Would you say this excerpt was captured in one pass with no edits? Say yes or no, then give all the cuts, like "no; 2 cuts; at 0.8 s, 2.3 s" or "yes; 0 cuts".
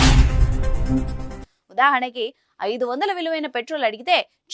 no; 1 cut; at 1.2 s